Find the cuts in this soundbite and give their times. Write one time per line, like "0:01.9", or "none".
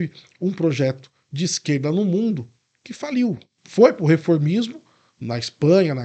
0:03.5